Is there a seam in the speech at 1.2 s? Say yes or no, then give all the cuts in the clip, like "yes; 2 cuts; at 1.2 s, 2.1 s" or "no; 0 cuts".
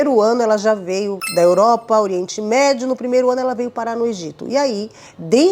yes; 1 cut; at 1.2 s